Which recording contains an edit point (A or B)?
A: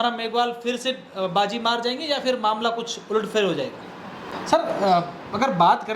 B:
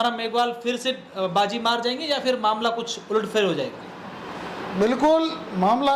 A